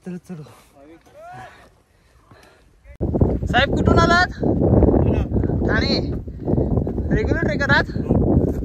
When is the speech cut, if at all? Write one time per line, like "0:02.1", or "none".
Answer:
0:03.0

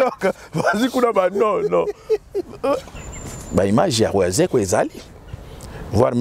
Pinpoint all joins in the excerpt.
0:03.0

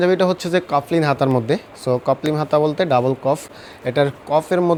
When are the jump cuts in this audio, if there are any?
none

